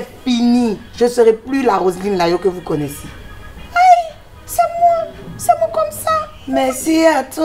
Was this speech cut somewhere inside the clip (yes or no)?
yes